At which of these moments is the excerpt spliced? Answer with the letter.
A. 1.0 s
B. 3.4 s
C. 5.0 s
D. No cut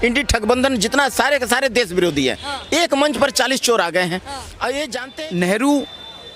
C